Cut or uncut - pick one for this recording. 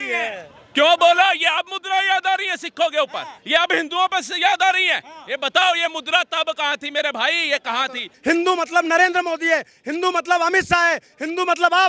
cut